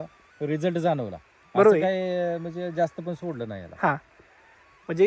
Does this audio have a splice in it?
no; 0 cuts

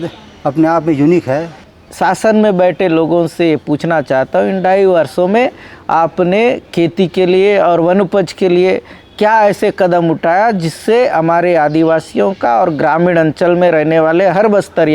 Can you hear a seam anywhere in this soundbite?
yes; 1 cut; at 1.6 s

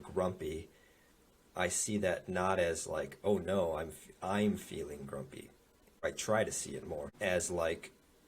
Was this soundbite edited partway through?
yes; 2 cuts; at 6.0 s, 7.1 s

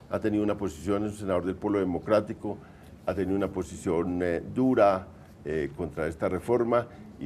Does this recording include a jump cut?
no; 0 cuts

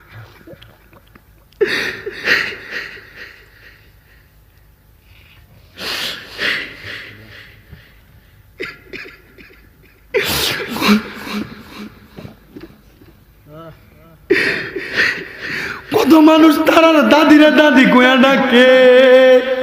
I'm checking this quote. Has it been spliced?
no; 0 cuts

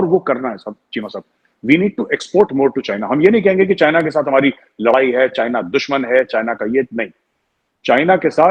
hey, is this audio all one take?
yes; 0 cuts

